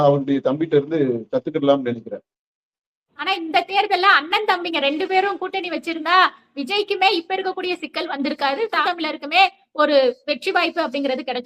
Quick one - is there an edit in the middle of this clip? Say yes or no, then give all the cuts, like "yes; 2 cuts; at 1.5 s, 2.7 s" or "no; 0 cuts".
yes; 2 cuts; at 3.1 s, 8.8 s